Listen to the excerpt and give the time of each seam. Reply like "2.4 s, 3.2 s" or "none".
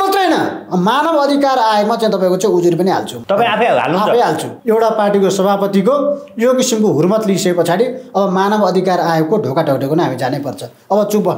3.1 s, 4.5 s

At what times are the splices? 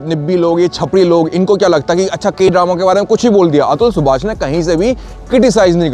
none

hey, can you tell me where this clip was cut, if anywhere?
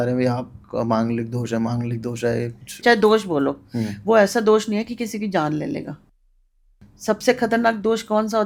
none

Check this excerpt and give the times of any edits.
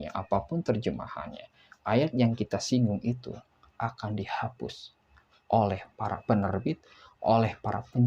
6.2 s

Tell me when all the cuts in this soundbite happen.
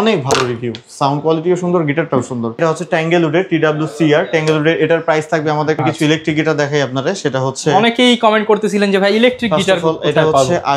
2.6 s, 5.8 s

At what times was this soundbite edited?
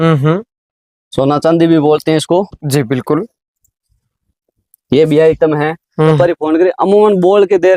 6.2 s

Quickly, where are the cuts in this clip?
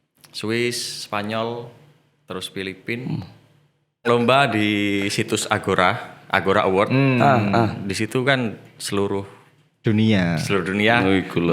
4.0 s

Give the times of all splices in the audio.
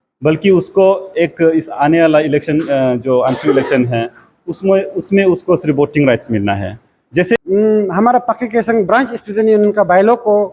7.4 s

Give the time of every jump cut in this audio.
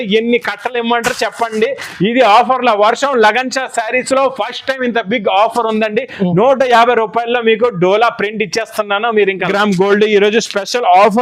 9.5 s

